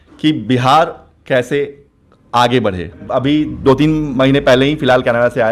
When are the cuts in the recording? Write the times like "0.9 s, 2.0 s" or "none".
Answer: 3.0 s